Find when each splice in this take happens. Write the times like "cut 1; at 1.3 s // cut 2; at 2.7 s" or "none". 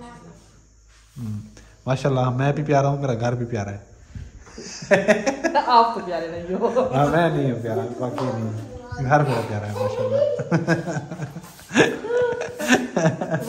none